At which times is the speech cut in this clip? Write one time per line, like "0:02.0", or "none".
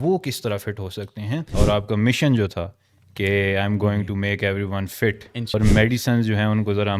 0:01.5
0:05.5